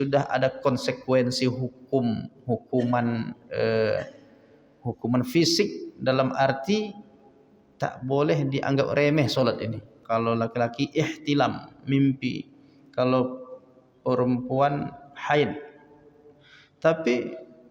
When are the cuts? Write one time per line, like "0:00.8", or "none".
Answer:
0:09.9